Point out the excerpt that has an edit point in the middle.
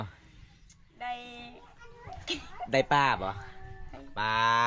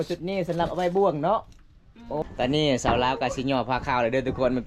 second; 1 cut; at 2.2 s

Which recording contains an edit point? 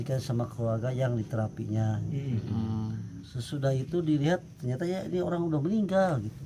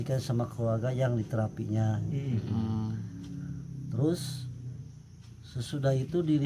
first; 1 cut; at 3.2 s

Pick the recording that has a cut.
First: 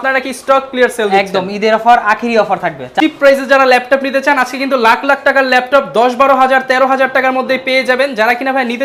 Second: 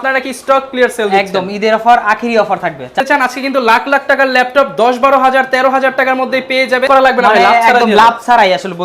second; 2 cuts; at 3.0 s, 6.8 s

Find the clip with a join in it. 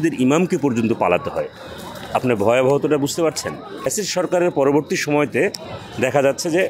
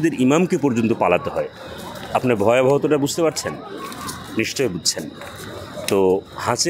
first; 1 cut; at 3.9 s

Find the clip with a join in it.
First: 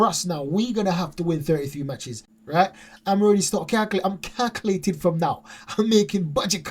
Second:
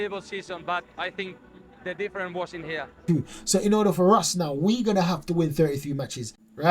second; 1 cut; at 3.0 s

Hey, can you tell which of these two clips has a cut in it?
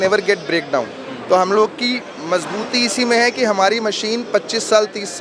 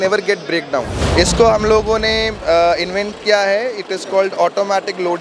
second; 1 cut; at 1.0 s

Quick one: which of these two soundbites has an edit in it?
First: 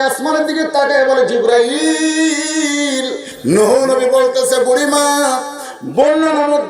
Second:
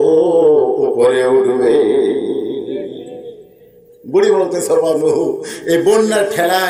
first; 1 cut; at 3.3 s

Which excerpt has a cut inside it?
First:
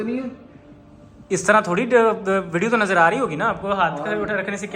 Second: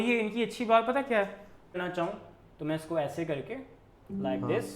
second; 1 cut; at 1.8 s

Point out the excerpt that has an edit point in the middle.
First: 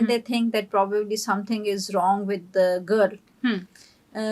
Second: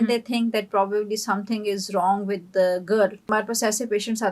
second; 1 cut; at 3.3 s

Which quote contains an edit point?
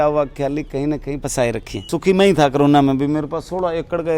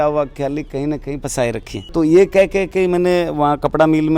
first; 1 cut; at 1.7 s

